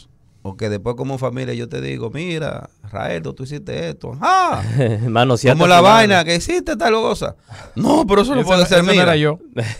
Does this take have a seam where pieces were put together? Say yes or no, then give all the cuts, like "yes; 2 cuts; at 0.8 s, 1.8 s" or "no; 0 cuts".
no; 0 cuts